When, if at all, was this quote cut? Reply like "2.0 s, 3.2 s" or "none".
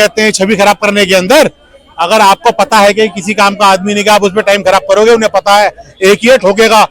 none